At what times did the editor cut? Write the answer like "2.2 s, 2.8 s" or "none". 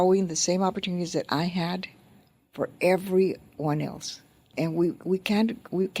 4.5 s